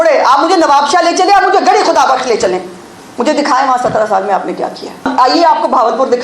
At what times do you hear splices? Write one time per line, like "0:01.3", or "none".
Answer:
0:05.1